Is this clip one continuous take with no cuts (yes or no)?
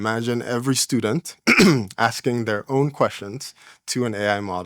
yes